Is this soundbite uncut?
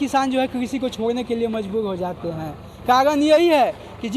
yes; 0 cuts

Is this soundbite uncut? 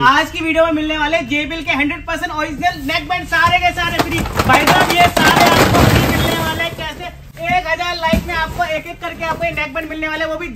yes; 0 cuts

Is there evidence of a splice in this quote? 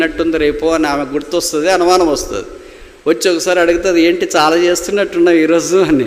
no; 0 cuts

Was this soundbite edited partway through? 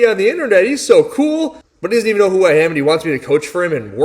no; 0 cuts

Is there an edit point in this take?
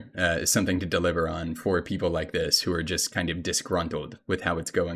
no; 0 cuts

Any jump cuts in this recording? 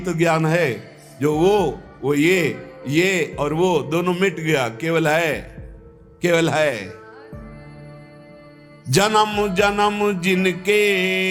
no; 0 cuts

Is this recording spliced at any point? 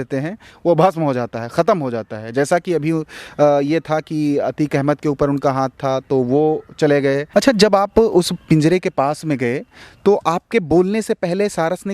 yes; 1 cut; at 7.3 s

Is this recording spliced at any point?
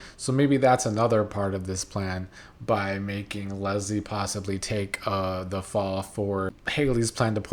yes; 1 cut; at 6.6 s

